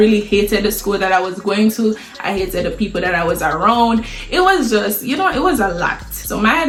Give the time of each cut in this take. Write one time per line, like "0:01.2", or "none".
none